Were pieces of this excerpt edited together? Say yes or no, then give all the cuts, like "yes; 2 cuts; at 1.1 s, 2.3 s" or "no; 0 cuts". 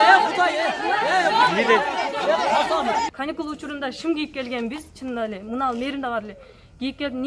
yes; 1 cut; at 3.1 s